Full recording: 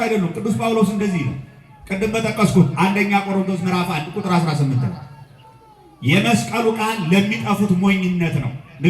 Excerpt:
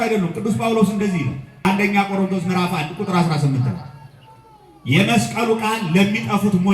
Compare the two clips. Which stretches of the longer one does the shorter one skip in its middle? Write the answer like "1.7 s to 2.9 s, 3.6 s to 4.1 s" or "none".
1.6 s to 2.7 s